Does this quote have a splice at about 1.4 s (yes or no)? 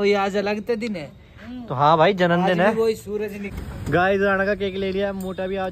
no